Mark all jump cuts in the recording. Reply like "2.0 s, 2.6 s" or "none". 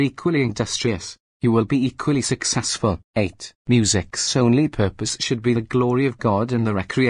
3.3 s

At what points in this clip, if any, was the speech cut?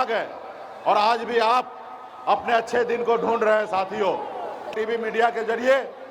4.7 s

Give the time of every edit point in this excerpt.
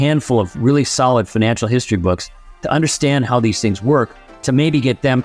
none

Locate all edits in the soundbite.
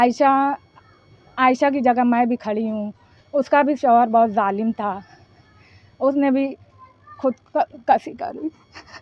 none

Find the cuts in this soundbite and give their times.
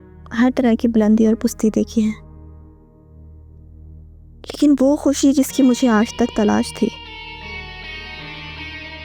none

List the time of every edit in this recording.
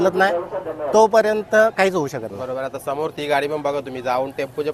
none

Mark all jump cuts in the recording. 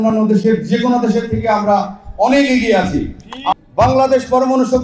3.4 s

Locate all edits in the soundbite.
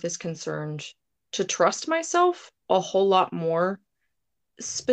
none

